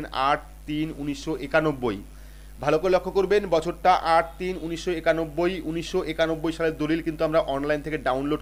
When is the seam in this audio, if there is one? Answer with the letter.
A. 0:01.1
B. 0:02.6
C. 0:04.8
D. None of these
D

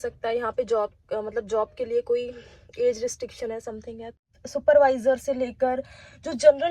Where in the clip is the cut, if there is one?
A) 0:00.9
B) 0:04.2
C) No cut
B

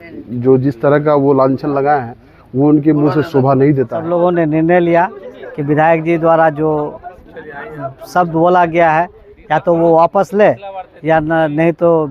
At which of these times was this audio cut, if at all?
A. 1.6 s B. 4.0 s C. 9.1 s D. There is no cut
B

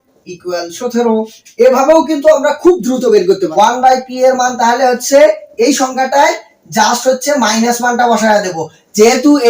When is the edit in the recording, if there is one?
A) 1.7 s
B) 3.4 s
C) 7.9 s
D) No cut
B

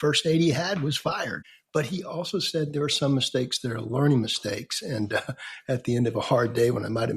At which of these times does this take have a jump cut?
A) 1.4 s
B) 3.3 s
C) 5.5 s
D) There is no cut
A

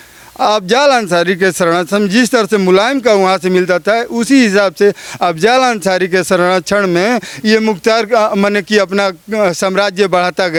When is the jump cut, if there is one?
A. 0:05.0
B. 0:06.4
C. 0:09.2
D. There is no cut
D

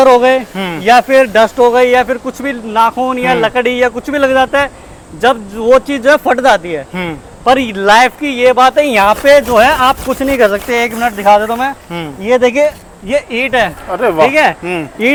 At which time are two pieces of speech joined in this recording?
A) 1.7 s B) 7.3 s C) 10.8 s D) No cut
D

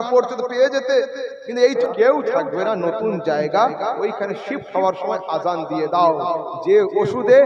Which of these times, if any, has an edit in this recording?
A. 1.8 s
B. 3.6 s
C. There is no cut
A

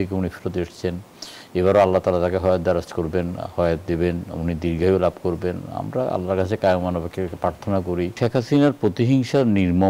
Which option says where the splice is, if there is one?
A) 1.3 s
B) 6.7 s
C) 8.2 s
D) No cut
C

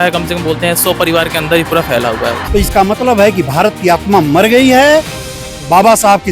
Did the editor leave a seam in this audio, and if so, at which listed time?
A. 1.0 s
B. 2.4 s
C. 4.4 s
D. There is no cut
B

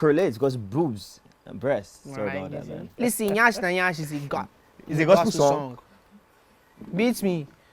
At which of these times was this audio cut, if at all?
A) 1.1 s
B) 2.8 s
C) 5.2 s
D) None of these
B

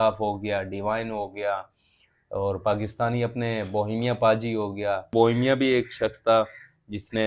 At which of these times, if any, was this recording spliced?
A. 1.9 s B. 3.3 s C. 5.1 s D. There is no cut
C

